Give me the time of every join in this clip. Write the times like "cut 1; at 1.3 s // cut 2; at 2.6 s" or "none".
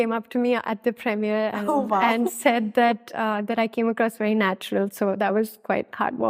none